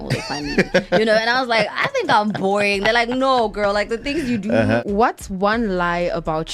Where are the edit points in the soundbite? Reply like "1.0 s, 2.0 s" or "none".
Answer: 4.8 s